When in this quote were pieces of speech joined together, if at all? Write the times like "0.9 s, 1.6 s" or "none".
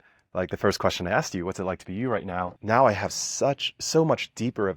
2.6 s